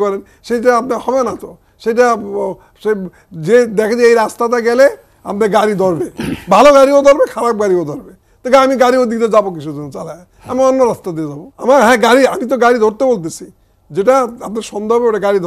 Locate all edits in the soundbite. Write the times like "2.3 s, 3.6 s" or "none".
11.4 s